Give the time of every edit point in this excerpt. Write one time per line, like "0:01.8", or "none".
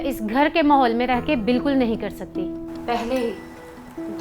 none